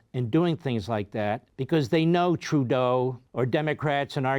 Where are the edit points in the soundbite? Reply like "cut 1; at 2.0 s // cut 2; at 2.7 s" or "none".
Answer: cut 1; at 1.5 s // cut 2; at 3.2 s